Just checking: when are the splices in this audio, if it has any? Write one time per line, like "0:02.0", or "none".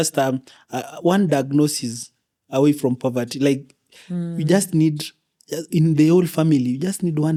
none